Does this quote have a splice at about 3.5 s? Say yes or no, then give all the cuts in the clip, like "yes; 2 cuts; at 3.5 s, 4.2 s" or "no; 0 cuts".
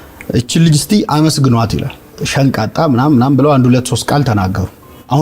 no; 1 cut; at 2.2 s